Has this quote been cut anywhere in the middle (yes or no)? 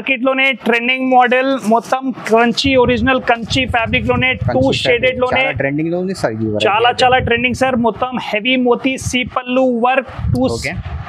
no